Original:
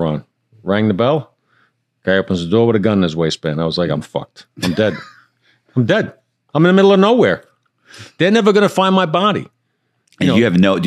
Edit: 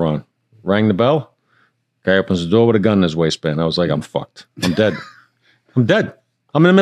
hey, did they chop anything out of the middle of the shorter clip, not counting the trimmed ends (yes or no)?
no